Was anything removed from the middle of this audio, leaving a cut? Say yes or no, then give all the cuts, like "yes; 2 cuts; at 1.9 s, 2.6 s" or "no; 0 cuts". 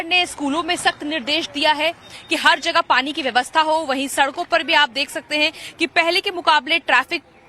yes; 1 cut; at 2.1 s